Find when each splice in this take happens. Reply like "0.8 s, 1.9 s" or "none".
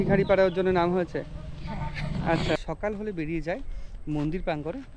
2.6 s